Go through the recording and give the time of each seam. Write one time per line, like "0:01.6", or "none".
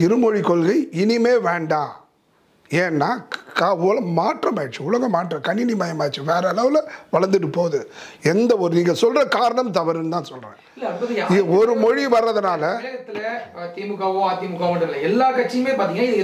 none